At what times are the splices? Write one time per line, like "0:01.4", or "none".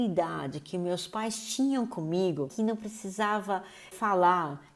0:02.5